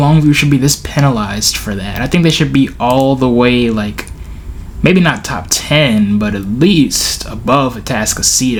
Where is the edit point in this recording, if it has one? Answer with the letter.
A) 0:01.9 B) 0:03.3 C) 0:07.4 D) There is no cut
D